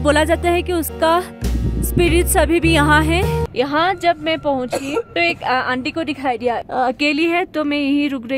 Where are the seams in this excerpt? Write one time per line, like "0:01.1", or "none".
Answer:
0:03.4
0:06.6